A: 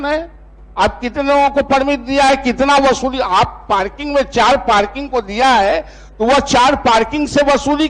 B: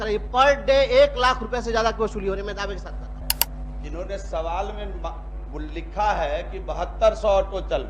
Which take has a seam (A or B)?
B